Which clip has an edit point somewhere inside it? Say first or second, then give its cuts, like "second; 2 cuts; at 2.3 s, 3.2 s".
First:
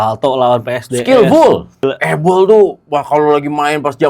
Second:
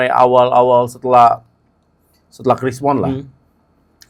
first; 1 cut; at 1.9 s